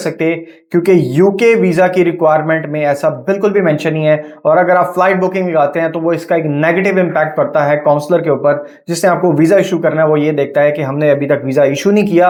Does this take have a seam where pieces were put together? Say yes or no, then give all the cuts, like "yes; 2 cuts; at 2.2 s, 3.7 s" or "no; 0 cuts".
no; 0 cuts